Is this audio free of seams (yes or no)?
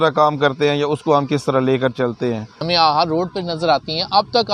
no